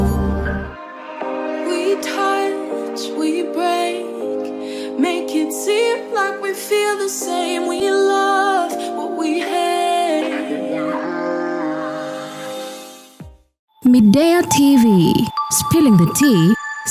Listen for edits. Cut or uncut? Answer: uncut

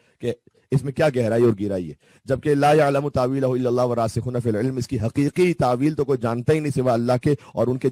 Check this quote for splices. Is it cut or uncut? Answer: uncut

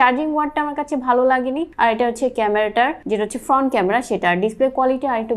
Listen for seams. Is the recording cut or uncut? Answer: uncut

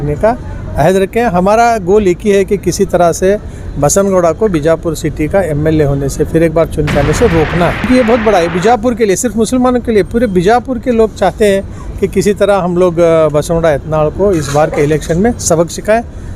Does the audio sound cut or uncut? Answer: cut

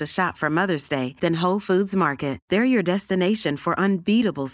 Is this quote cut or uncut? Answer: uncut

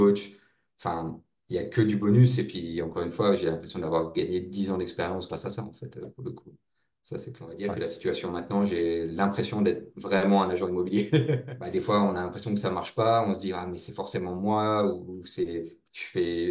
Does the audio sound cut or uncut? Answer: cut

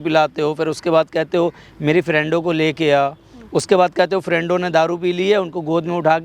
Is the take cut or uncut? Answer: uncut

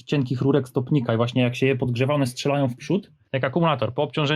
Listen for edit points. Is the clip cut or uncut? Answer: cut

